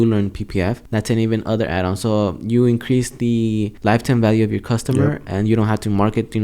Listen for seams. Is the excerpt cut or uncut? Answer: cut